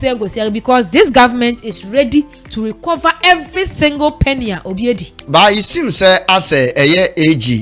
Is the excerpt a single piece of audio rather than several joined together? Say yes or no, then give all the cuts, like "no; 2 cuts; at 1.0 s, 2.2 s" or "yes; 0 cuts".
yes; 0 cuts